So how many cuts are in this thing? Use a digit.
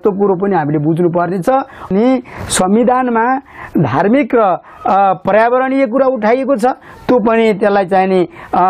1